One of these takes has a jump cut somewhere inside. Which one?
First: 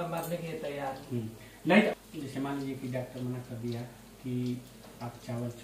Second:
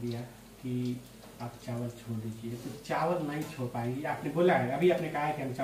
first; 1 cut; at 1.9 s

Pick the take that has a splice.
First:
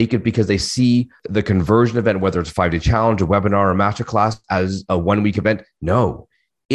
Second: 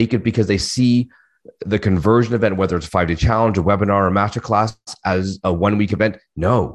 first; 2 cuts; at 1.2 s, 4.4 s

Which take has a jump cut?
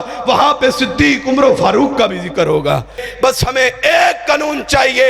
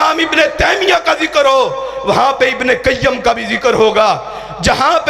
first; 1 cut; at 3.0 s

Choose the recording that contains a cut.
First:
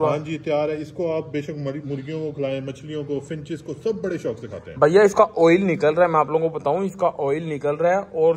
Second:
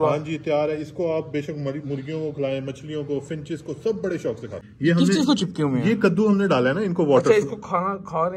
second; 1 cut; at 4.6 s

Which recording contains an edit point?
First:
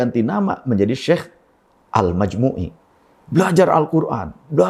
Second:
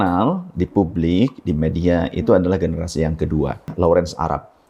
second; 1 cut; at 3.7 s

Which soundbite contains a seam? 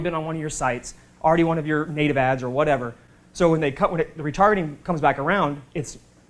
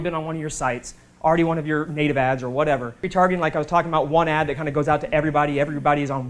second; 1 cut; at 3.0 s

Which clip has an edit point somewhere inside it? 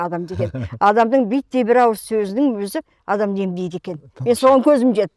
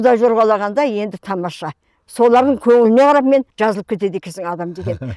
second; 1 cut; at 3.5 s

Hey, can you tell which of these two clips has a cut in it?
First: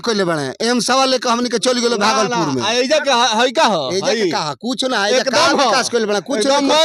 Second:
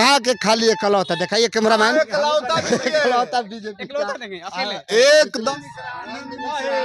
second; 1 cut; at 5.5 s

